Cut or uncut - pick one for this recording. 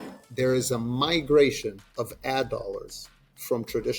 cut